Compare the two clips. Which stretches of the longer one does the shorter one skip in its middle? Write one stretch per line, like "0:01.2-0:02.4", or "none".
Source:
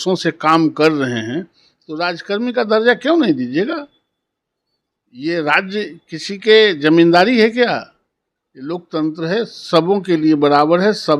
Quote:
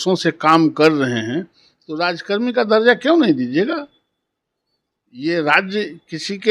none